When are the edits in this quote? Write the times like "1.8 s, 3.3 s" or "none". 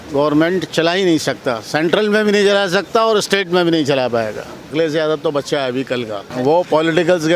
4.7 s, 6.3 s